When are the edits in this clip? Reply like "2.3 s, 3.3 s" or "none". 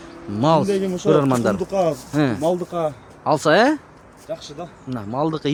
none

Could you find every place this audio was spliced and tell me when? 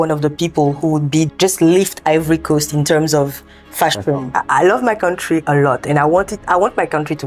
1.3 s, 4.3 s, 6.4 s

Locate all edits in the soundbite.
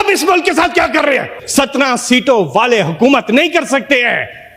1.4 s

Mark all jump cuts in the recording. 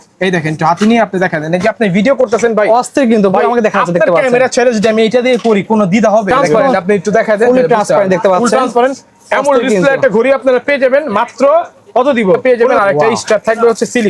6.3 s, 12.4 s

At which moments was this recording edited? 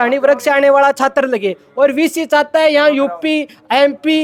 none

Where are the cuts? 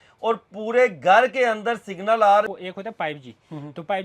2.5 s

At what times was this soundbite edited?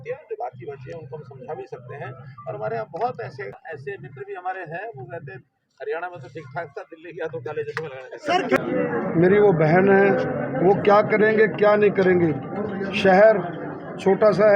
3.6 s, 8.6 s

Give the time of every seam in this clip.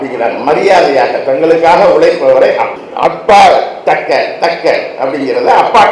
2.7 s

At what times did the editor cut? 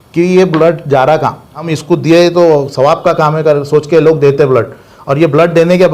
1.6 s

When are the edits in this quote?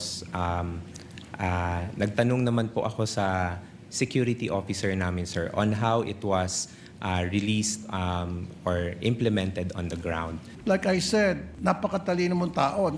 10.5 s, 11.5 s

